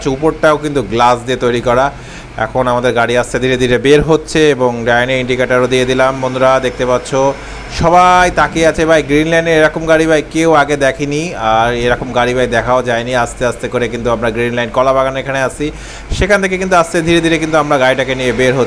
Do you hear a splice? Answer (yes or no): no